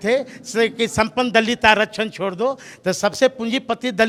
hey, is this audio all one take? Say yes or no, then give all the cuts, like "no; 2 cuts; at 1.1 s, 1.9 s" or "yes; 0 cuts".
yes; 0 cuts